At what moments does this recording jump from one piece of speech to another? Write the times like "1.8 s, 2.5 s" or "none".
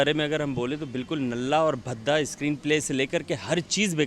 none